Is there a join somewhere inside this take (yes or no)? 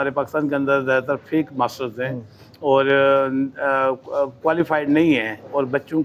no